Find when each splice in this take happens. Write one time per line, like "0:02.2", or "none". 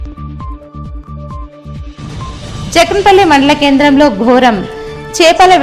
none

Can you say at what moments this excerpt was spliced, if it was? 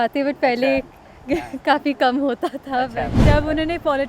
0:03.1

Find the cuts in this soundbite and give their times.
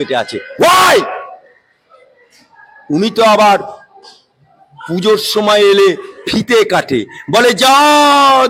none

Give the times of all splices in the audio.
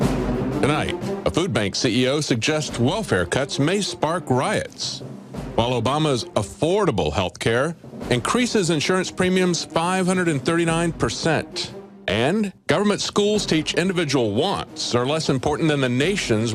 0:01.8

